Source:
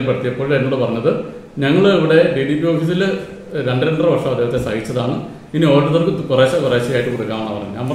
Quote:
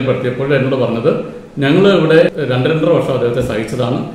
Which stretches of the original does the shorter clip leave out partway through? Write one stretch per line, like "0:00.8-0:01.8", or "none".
0:02.3-0:03.5